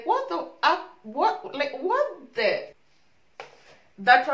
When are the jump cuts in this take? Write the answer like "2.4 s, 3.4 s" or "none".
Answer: 2.8 s